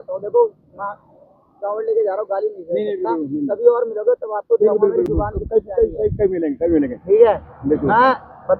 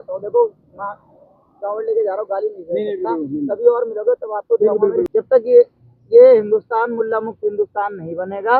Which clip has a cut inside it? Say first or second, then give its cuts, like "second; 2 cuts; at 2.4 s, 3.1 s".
second; 1 cut; at 5.1 s